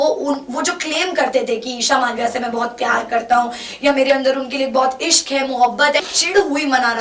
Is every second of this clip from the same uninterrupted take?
no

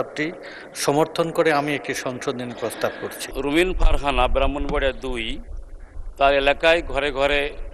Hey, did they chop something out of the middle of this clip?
yes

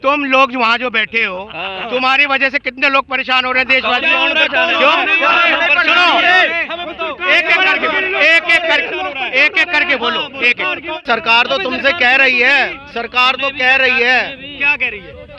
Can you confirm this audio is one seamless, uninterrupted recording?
no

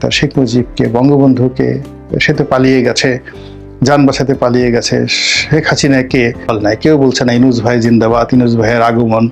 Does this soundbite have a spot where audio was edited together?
yes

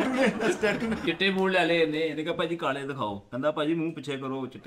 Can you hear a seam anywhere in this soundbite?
yes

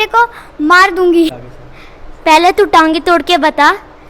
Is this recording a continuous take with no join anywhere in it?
no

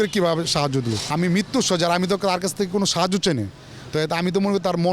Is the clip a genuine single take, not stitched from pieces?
no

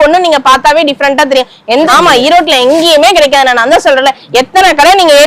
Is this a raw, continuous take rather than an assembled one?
no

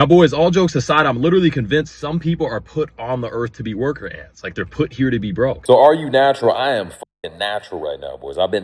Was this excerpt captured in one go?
no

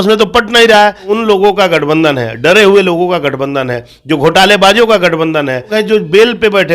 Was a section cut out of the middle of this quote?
yes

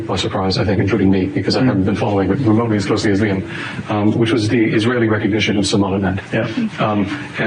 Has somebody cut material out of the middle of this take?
no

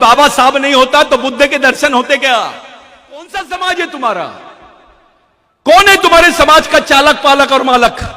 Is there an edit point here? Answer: yes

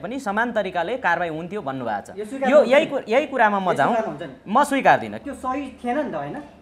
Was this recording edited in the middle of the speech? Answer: yes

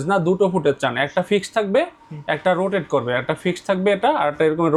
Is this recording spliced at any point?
no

